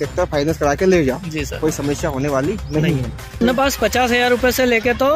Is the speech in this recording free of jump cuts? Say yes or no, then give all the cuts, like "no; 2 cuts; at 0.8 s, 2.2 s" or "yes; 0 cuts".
no; 1 cut; at 3.4 s